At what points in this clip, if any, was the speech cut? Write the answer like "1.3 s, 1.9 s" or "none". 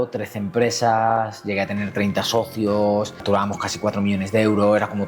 3.2 s